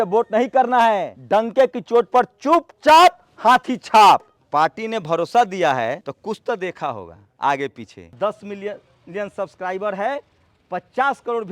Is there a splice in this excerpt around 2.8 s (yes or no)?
no